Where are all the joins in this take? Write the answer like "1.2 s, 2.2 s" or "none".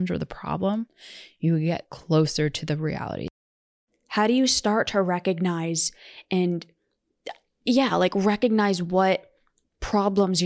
3.3 s